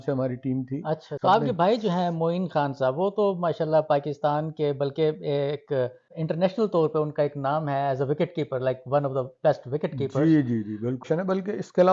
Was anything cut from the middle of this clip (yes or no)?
yes